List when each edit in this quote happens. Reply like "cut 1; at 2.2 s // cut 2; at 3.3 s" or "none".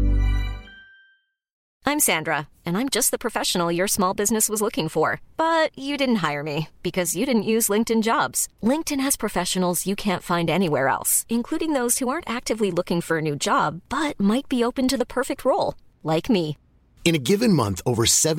cut 1; at 1.6 s